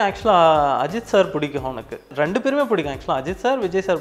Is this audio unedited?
no; 1 cut; at 2.1 s

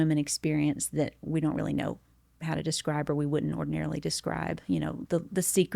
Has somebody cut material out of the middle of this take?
no; 0 cuts

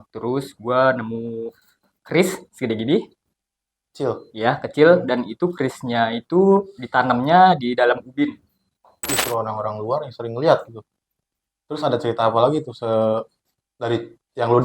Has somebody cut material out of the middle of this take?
yes; 1 cut; at 9.0 s

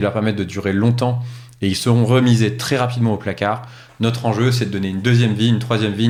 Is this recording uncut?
yes; 0 cuts

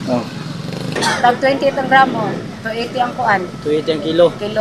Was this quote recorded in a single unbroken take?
no; 1 cut; at 1.0 s

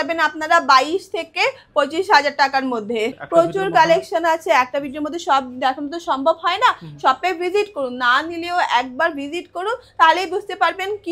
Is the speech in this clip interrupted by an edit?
yes; 1 cut; at 3.2 s

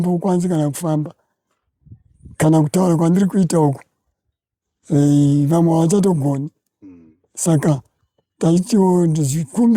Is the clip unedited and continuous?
yes; 0 cuts

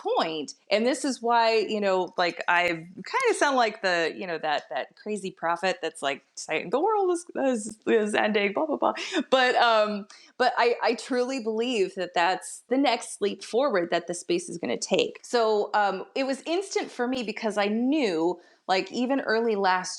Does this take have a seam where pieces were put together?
yes; 1 cut; at 15.2 s

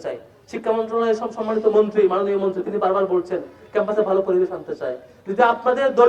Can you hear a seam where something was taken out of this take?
no; 0 cuts

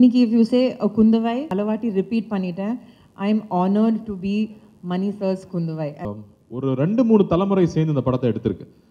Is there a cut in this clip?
yes; 2 cuts; at 1.4 s, 6.0 s

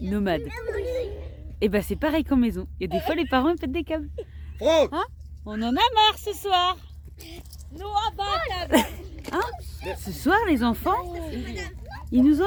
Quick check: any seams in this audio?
no; 0 cuts

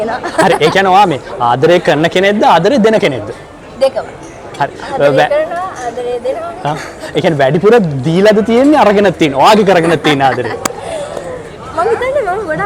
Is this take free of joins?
yes; 0 cuts

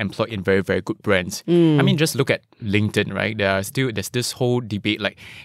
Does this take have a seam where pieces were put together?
no; 0 cuts

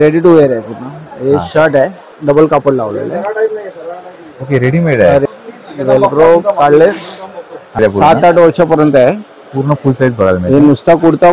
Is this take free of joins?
no; 3 cuts; at 2.1 s, 5.2 s, 7.8 s

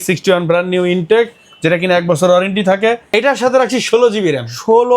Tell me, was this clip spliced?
yes; 1 cut; at 3.1 s

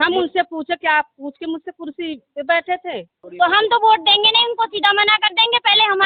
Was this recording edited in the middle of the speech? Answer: yes; 1 cut; at 3.2 s

